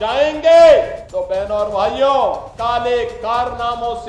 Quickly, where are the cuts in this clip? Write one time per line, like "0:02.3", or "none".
0:01.0
0:02.5